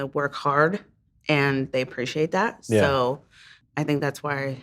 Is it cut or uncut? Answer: cut